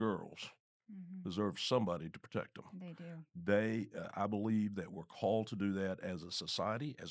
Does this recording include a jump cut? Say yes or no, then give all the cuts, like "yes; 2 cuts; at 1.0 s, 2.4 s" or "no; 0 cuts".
no; 0 cuts